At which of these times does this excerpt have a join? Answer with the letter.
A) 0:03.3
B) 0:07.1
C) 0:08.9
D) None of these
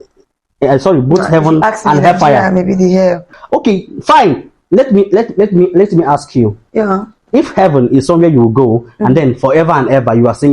A